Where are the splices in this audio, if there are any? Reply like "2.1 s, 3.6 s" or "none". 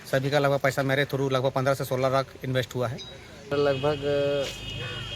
3.5 s